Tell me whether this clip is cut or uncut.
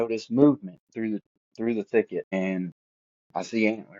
cut